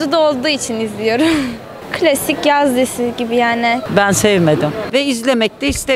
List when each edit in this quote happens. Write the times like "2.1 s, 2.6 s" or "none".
3.9 s, 4.8 s